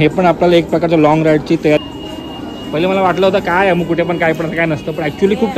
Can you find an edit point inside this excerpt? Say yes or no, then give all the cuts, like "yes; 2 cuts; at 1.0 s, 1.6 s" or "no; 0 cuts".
yes; 1 cut; at 1.8 s